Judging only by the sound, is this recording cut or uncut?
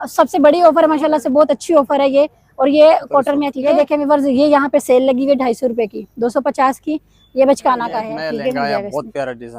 cut